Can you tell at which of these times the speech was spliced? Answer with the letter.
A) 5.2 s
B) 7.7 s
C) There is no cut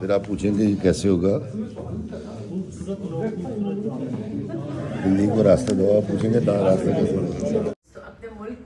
B